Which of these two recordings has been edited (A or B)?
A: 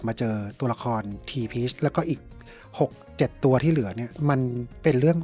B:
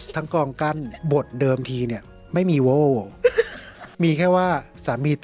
B